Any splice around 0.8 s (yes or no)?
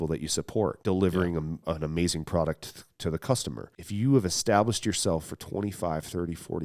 yes